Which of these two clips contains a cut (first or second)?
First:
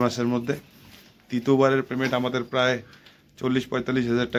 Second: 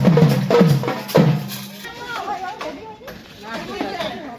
second